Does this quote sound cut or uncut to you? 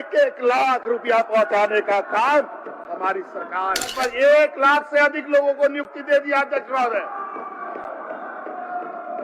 cut